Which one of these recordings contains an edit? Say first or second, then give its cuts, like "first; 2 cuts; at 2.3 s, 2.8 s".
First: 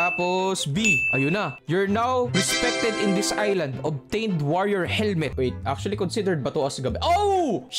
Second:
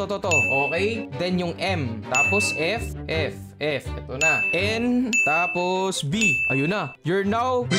first; 1 cut; at 5.3 s